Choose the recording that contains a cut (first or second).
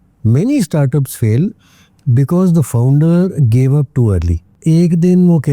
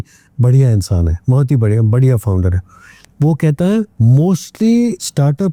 first